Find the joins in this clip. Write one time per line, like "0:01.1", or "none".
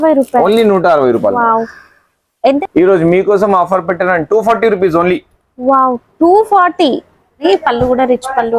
0:02.1
0:07.4